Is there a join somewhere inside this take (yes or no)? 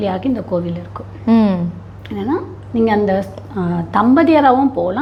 no